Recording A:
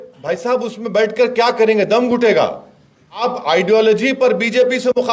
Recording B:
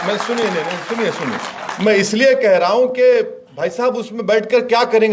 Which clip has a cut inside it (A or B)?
A